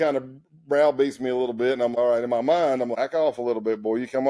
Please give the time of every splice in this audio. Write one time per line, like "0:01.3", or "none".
0:01.9
0:02.9